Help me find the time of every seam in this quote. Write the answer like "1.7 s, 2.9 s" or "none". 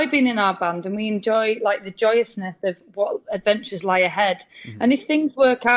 none